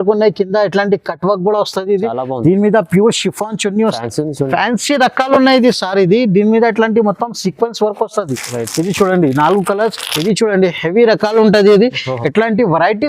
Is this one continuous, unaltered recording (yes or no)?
no